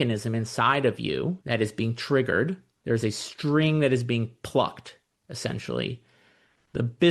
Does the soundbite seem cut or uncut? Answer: cut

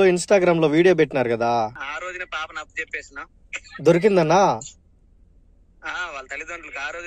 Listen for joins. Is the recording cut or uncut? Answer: cut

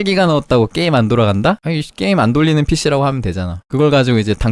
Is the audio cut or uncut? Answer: cut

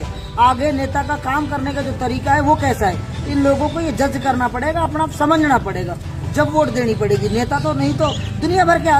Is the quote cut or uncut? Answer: uncut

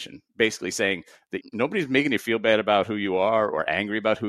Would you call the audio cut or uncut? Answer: cut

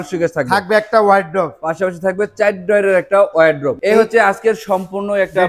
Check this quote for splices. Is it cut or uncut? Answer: uncut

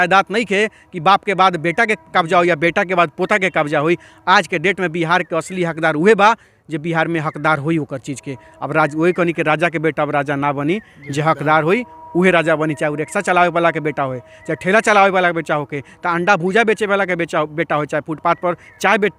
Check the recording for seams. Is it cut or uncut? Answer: uncut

